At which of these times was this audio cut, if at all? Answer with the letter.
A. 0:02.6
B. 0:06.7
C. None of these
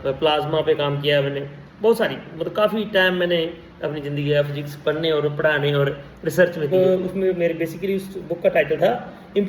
B